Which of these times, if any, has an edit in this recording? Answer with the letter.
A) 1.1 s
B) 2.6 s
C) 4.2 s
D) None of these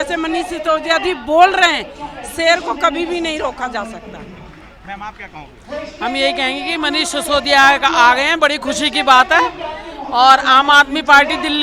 D